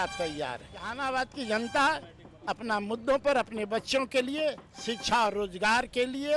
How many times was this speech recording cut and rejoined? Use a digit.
1